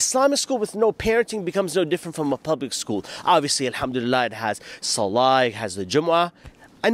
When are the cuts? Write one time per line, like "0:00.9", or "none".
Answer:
none